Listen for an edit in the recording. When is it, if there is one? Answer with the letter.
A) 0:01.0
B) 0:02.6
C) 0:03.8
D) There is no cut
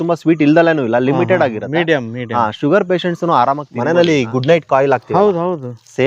C